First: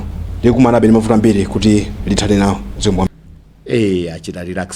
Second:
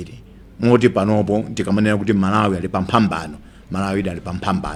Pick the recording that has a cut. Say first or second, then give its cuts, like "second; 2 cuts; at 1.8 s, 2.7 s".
first; 1 cut; at 3.1 s